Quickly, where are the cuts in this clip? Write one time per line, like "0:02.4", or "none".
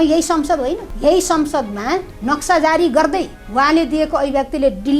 0:00.9
0:02.1
0:03.4